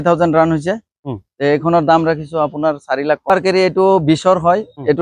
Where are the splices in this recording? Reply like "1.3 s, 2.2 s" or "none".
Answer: 3.3 s